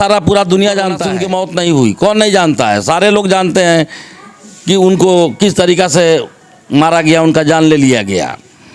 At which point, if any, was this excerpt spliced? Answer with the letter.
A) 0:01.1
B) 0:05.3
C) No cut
A